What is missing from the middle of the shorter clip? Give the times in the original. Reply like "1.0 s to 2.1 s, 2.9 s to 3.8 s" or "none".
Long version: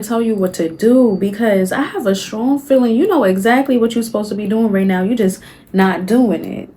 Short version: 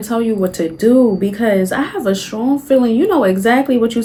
none